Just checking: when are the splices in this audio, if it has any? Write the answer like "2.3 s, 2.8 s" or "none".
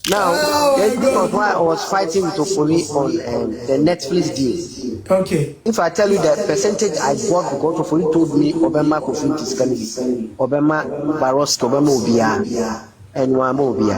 4.9 s, 5.5 s

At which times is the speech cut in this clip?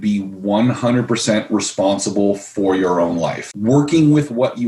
3.5 s

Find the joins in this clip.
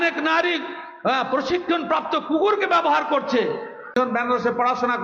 3.9 s

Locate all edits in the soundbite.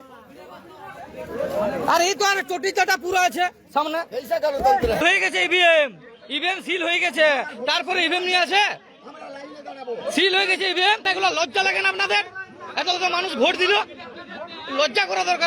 5.0 s, 11.0 s

